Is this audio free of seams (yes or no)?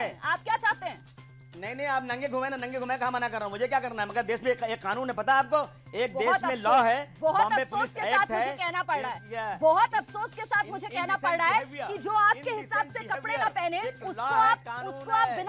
yes